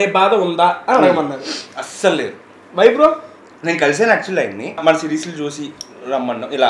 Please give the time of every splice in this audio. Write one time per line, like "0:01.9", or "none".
0:04.8